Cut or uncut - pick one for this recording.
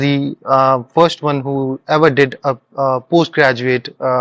uncut